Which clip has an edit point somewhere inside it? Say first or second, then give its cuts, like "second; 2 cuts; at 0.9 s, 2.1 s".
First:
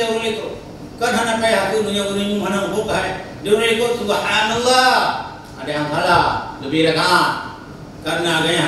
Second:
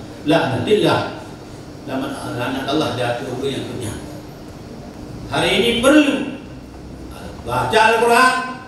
second; 1 cut; at 4.9 s